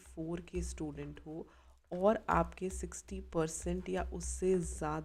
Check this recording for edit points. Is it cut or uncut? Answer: uncut